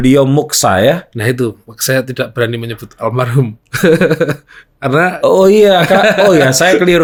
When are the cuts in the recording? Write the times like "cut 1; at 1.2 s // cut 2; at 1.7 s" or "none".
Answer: none